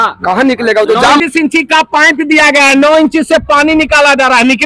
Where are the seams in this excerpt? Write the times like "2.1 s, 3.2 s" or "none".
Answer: 1.2 s